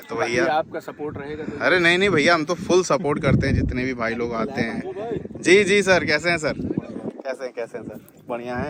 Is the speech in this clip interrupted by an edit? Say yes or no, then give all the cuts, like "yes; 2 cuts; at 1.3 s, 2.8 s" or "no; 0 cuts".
no; 0 cuts